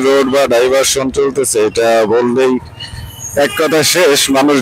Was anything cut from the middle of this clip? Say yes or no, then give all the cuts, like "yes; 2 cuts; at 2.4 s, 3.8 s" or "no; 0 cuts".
no; 0 cuts